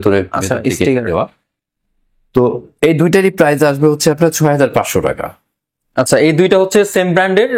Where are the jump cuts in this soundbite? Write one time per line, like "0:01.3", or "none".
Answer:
none